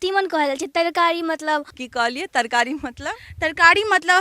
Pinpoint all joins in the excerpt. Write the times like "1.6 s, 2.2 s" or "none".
1.8 s